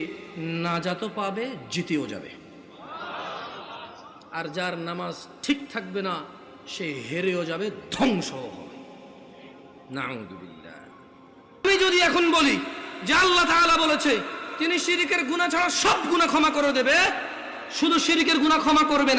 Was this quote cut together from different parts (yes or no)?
yes